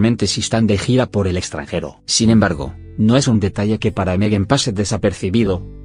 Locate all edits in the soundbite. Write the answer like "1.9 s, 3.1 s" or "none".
1.9 s